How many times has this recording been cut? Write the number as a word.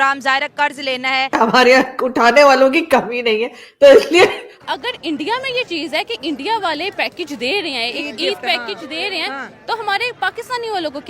two